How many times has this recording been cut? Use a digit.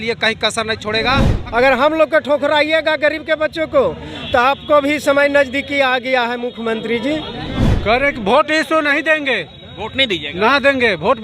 2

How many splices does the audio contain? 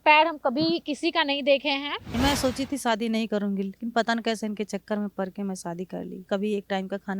2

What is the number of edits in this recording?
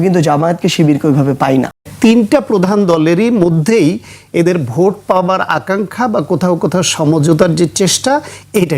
1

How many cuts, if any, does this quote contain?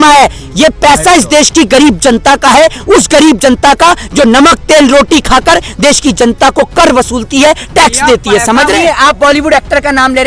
1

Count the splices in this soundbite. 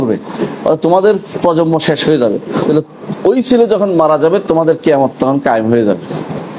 1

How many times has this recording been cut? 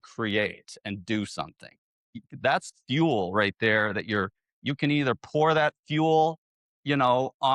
1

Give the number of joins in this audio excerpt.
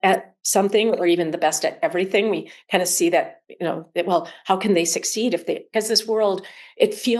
0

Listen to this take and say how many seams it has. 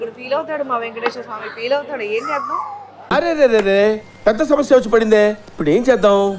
0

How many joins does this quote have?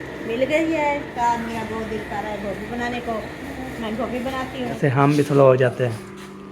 2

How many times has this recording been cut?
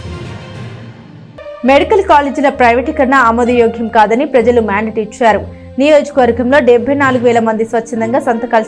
0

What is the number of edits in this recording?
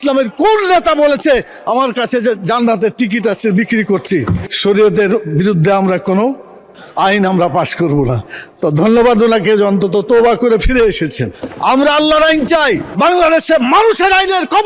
2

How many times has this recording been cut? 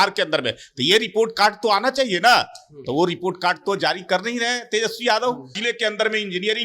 1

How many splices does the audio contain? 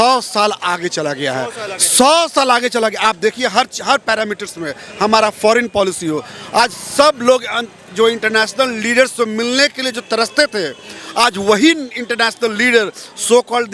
0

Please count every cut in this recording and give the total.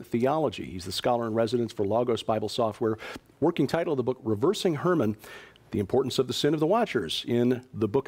1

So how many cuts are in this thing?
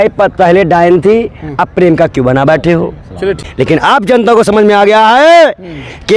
1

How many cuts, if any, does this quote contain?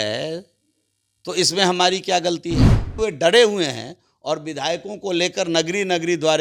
1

